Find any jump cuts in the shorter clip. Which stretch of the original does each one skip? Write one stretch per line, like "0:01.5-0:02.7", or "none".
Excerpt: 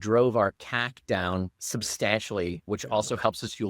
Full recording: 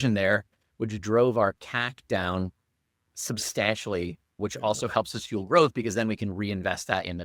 0:02.6-0:03.2
0:04.2-0:04.3

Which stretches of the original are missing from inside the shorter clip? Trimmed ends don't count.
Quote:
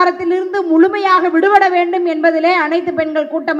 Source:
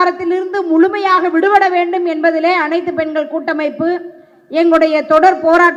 none

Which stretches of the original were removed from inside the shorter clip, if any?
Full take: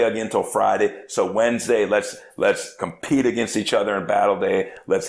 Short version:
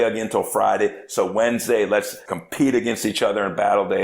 0:02.2-0:02.7

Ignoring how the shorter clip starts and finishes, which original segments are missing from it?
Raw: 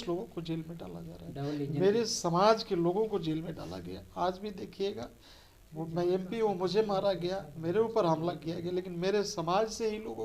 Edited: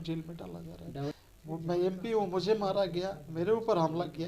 0:01.5-0:05.4

